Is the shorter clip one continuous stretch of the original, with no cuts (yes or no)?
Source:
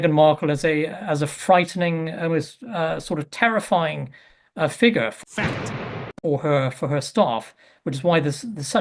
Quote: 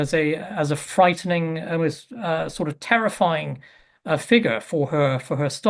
no